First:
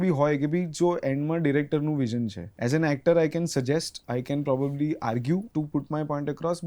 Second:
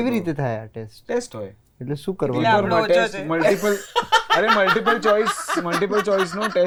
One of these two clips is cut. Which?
first; 3 cuts; at 2.4 s, 4.0 s, 5.5 s

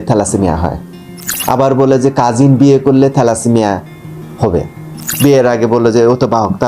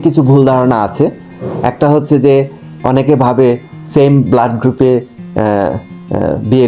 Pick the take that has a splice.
first; 2 cuts; at 1.3 s, 5.1 s

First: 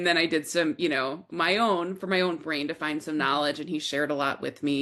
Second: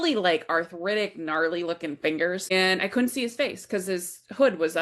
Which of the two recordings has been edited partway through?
second; 1 cut; at 2.5 s

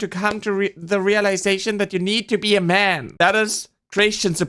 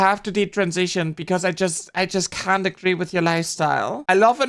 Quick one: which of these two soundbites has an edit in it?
first; 1 cut; at 3.0 s

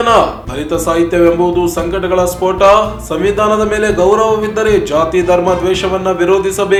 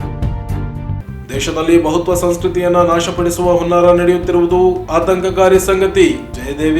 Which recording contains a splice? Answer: second; 1 cut; at 0.9 s

